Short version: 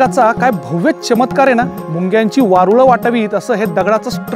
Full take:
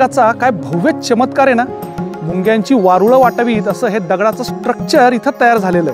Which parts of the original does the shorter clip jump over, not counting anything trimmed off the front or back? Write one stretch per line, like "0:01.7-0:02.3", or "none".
0:01.8-0:02.2